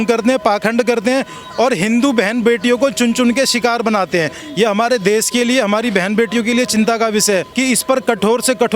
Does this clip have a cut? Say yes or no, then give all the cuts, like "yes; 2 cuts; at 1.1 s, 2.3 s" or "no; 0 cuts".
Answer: yes; 2 cuts; at 4.4 s, 7.5 s